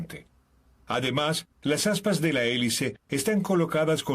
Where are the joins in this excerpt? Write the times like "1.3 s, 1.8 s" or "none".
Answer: 2.2 s